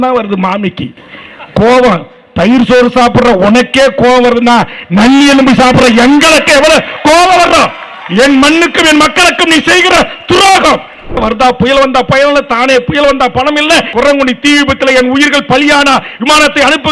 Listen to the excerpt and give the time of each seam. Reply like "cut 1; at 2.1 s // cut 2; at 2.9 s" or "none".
cut 1; at 11.2 s // cut 2; at 13.9 s